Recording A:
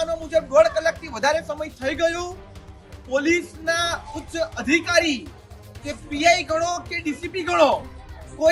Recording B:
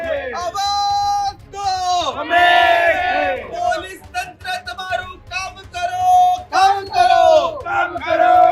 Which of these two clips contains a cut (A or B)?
B